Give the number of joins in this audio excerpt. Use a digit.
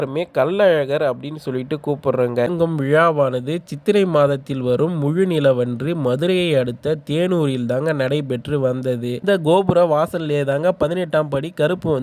2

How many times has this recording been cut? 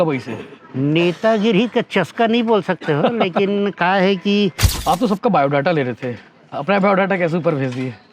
1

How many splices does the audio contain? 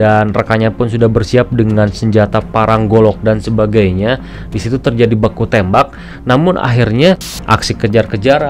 1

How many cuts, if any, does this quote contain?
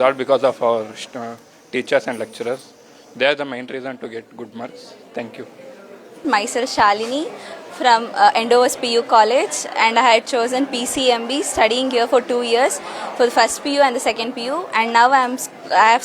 0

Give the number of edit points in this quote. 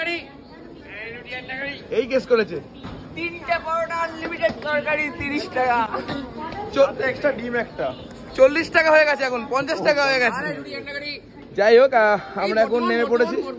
0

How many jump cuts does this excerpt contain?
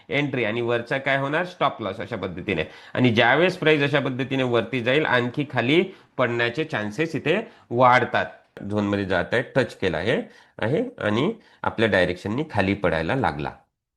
1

